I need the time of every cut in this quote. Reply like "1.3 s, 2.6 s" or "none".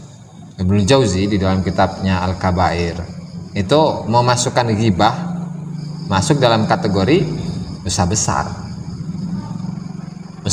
none